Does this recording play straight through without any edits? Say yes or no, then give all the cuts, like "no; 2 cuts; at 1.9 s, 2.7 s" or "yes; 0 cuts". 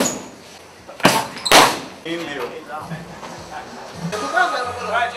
no; 1 cut; at 4.1 s